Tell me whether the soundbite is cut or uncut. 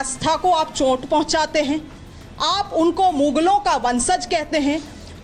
uncut